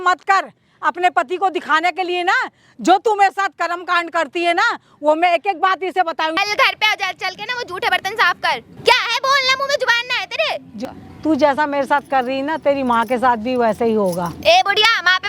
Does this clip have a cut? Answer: yes; 3 cuts; at 6.4 s, 8.7 s, 10.8 s

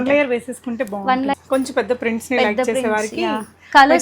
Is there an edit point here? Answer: yes; 1 cut; at 1.3 s

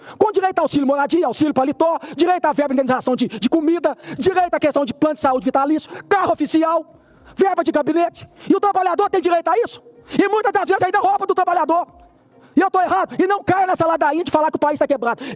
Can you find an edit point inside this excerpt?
no; 0 cuts

